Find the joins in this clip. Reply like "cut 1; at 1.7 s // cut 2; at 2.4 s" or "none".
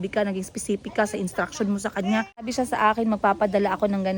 cut 1; at 2.5 s